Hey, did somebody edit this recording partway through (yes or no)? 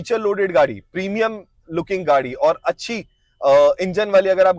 no